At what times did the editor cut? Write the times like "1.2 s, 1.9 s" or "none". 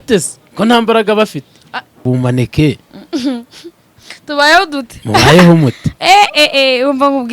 2.0 s